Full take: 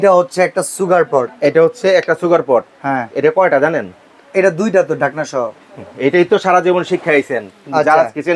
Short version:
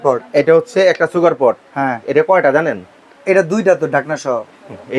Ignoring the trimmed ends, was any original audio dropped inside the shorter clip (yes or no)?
no